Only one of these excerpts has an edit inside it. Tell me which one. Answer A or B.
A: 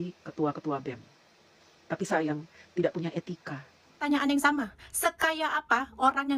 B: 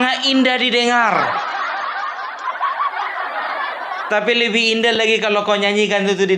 A